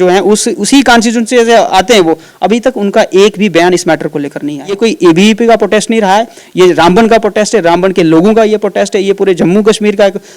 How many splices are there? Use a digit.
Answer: 1